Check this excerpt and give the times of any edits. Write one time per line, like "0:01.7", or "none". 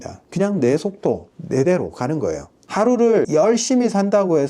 0:01.3
0:02.5
0:03.3

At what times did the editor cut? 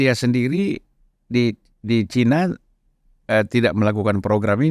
none

